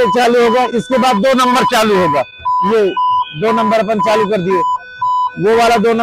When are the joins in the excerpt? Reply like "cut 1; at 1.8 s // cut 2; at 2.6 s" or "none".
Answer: none